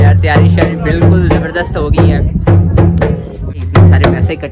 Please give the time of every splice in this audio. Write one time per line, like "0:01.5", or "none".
0:03.6